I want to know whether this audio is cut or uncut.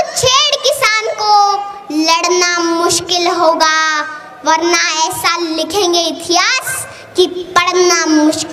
uncut